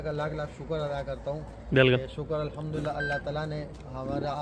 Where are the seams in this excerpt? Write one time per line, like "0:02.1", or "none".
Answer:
none